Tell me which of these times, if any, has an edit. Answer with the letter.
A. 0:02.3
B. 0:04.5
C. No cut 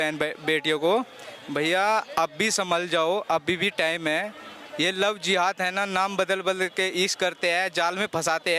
C